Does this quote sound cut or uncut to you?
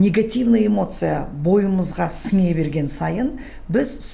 uncut